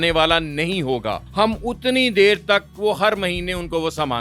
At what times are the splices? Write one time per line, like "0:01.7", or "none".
0:01.2